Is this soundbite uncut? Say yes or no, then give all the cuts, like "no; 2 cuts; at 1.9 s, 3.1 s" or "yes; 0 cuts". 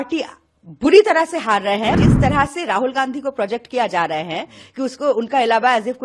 no; 1 cut; at 1.9 s